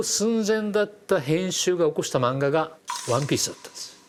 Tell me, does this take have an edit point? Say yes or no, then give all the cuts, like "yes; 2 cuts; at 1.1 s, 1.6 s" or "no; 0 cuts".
no; 0 cuts